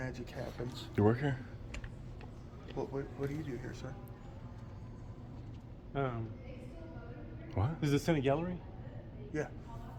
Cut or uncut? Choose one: uncut